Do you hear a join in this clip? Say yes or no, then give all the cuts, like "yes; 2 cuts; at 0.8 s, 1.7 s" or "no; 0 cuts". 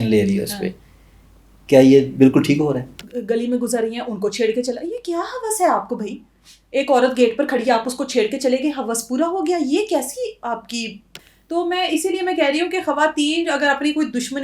yes; 2 cuts; at 3.0 s, 11.3 s